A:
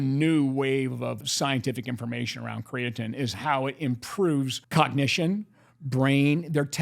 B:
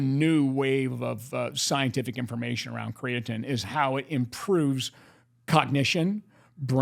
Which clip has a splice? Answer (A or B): A